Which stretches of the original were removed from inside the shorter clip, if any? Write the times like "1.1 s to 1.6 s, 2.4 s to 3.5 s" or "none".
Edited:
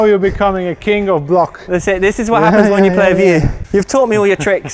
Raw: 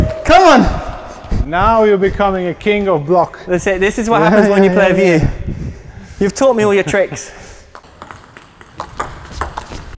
5.4 s to 6.0 s